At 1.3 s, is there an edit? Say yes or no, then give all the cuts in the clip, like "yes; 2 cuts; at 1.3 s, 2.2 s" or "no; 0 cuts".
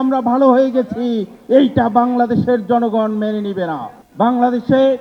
no; 1 cut; at 4.0 s